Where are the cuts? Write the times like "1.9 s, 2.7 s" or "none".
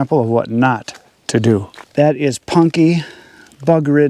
1.8 s